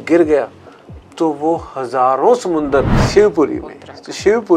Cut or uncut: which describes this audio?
cut